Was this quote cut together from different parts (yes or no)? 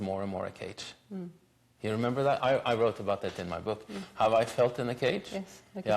no